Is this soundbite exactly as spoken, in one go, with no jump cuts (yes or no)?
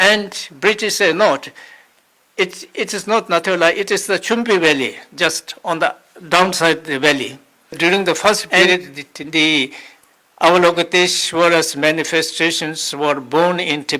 no